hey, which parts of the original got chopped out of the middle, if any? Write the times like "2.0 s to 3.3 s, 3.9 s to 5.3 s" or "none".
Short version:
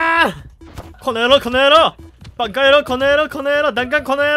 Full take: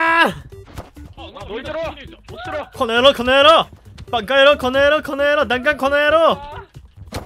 0.9 s to 2.7 s